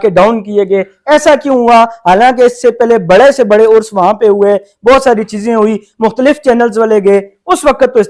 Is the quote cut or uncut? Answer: uncut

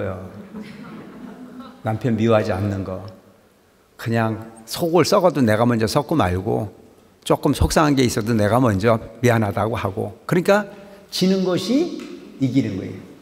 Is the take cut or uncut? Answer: uncut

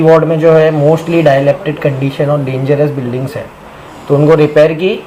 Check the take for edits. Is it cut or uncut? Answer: uncut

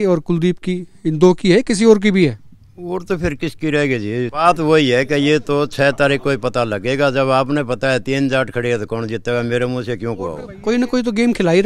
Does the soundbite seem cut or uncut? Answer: cut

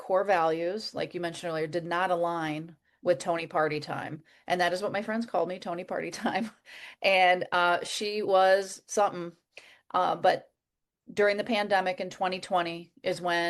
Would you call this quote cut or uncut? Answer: uncut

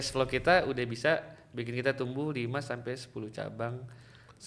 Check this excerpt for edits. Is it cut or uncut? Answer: uncut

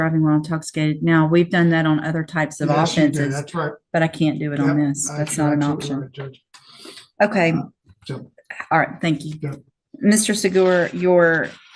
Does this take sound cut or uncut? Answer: uncut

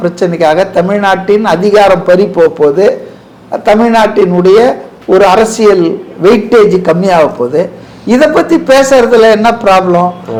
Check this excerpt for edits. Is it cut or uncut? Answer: uncut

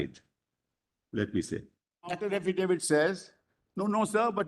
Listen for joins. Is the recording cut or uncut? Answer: cut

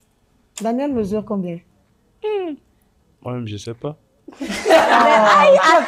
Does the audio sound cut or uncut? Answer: uncut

